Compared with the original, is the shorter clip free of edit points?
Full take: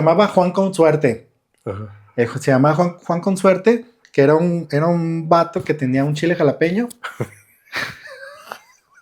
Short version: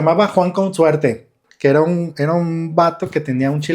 no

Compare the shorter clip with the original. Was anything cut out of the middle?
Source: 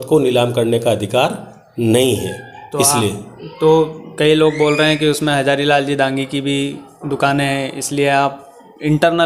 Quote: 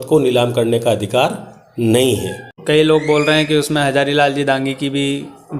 yes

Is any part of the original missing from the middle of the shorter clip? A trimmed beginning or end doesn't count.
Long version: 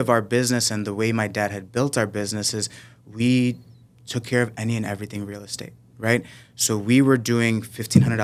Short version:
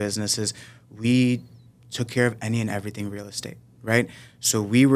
no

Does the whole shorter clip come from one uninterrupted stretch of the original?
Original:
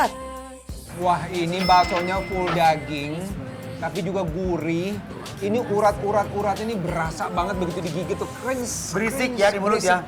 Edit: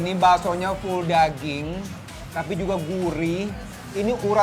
yes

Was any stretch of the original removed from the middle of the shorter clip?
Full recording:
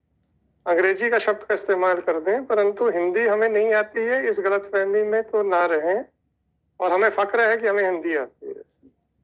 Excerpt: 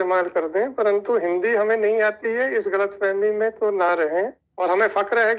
yes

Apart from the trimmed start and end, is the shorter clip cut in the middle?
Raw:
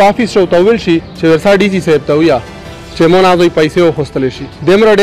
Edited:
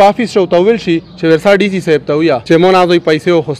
yes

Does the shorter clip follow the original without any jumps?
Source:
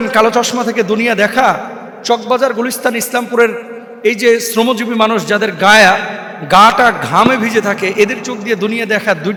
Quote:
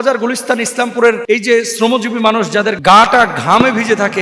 no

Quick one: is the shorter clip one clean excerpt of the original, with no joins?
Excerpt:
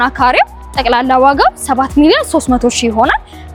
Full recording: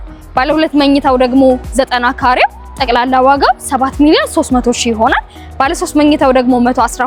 yes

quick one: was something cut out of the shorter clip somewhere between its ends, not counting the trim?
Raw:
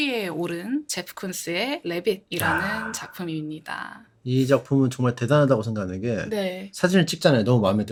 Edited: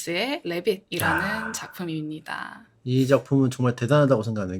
no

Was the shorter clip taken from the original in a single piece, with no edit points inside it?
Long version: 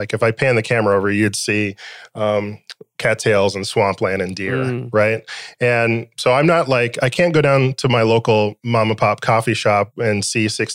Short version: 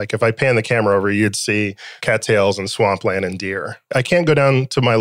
no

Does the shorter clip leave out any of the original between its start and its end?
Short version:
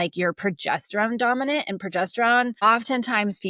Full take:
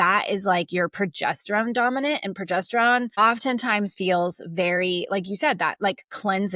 no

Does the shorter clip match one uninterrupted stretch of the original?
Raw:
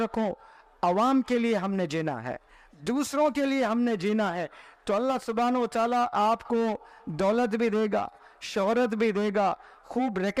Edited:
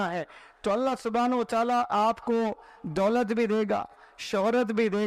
yes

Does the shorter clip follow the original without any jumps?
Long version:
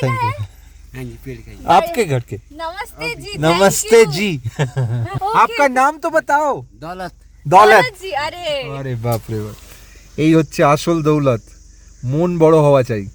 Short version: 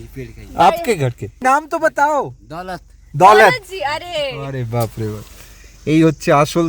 no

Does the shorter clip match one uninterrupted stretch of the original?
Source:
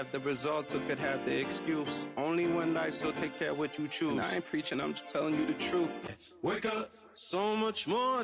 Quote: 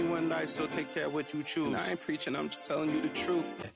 yes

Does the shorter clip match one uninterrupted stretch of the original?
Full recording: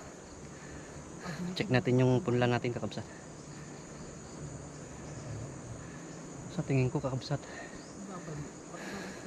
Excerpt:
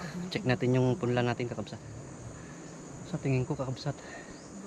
no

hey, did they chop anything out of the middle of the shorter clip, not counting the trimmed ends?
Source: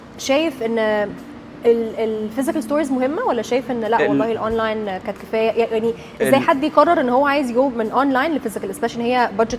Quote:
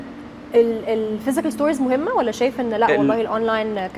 no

